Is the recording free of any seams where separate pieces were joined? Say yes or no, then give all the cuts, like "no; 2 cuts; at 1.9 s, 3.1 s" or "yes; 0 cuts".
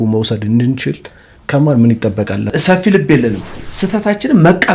no; 2 cuts; at 2.5 s, 3.6 s